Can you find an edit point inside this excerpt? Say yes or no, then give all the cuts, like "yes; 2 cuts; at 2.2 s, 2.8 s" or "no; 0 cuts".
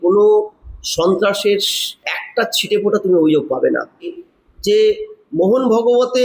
yes; 1 cut; at 4.2 s